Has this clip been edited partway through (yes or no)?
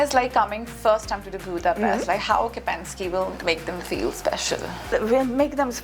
yes